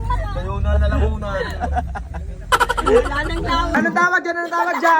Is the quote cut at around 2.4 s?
no; 1 cut; at 3.7 s

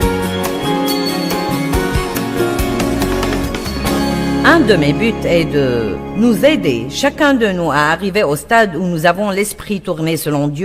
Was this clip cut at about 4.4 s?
yes; 1 cut; at 4.4 s

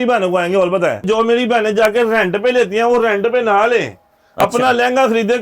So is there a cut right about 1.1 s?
yes; 1 cut; at 1.1 s

